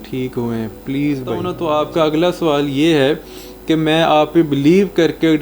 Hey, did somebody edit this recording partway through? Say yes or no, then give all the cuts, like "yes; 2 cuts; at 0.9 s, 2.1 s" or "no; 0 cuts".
yes; 1 cut; at 1.5 s